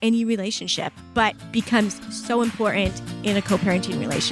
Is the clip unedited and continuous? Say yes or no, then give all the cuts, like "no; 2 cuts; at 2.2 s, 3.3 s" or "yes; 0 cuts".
no; 3 cuts; at 1.4 s, 2.1 s, 3.1 s